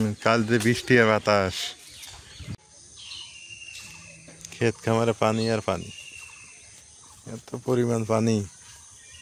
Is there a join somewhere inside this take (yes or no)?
yes